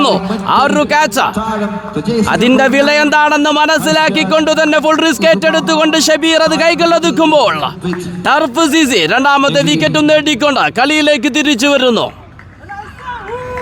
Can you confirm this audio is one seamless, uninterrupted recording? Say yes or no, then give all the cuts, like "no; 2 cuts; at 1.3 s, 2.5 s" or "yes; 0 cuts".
yes; 0 cuts